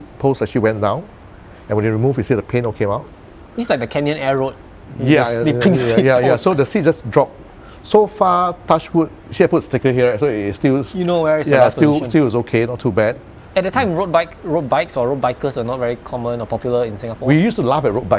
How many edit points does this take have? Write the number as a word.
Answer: one